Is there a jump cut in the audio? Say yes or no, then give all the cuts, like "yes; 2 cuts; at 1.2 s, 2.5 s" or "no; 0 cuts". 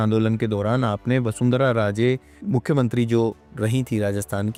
no; 0 cuts